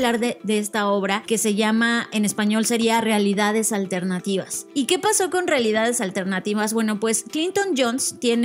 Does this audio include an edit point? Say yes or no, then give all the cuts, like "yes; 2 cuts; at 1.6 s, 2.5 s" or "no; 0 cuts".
yes; 2 cuts; at 1.2 s, 4.6 s